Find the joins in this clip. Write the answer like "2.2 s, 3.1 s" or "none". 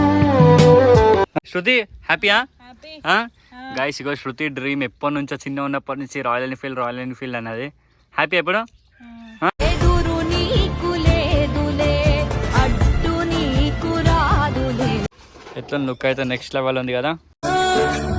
1.4 s, 15.0 s